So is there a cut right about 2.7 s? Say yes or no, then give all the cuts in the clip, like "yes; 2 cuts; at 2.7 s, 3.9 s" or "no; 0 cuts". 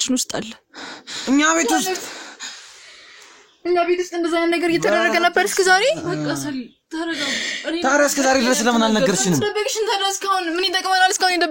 no; 0 cuts